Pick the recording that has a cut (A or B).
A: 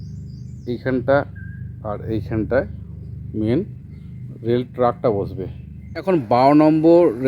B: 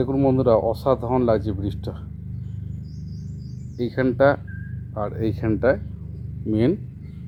A